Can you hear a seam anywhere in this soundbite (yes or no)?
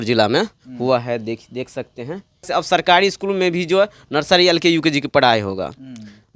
yes